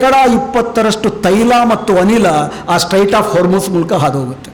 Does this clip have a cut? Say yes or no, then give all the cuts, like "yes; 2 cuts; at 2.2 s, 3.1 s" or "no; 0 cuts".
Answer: no; 0 cuts